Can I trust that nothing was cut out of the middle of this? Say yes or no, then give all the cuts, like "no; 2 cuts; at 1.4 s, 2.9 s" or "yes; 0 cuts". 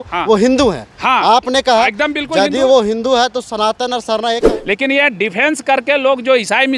no; 1 cut; at 4.4 s